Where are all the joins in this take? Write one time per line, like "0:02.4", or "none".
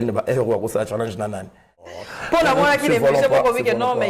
0:01.8